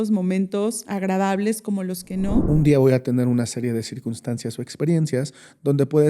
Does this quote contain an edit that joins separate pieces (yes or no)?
yes